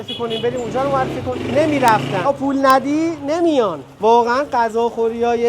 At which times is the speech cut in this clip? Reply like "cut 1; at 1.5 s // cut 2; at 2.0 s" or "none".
cut 1; at 1.3 s // cut 2; at 2.2 s // cut 3; at 3.9 s